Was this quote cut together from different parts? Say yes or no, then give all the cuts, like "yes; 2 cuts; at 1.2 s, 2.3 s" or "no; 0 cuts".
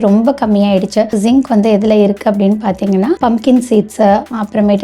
yes; 2 cuts; at 1.2 s, 3.2 s